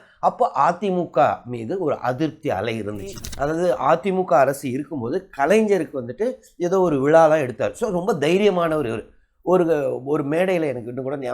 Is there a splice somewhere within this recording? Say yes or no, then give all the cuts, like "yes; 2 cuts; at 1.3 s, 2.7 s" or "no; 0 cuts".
yes; 1 cut; at 3.3 s